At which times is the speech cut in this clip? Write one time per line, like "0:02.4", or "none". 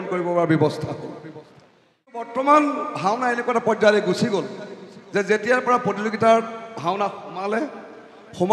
0:02.3

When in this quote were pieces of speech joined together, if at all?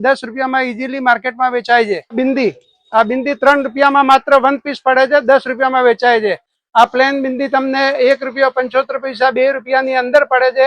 0:02.2
0:06.5

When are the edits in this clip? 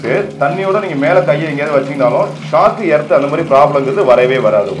none

